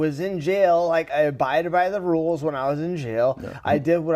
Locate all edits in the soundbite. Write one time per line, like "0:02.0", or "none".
0:01.1